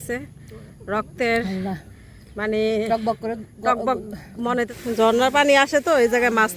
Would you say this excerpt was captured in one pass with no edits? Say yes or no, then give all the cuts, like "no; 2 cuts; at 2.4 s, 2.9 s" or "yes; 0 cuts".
no; 1 cut; at 4.7 s